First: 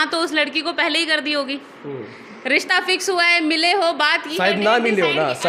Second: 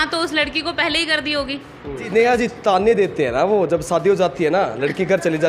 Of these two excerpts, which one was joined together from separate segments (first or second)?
second